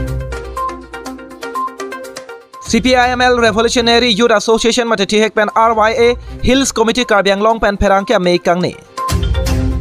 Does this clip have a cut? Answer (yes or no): yes